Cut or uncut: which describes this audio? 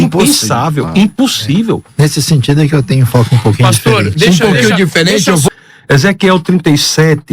cut